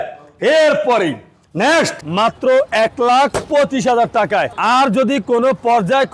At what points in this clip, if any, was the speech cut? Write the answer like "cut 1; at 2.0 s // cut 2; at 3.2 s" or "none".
cut 1; at 2.0 s